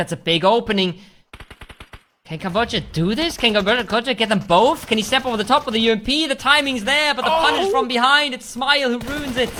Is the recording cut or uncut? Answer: uncut